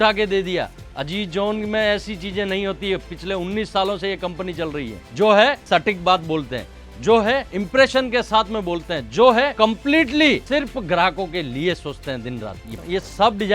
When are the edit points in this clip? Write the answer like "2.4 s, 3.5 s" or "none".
5.0 s, 5.6 s, 7.5 s, 9.5 s, 10.4 s, 12.8 s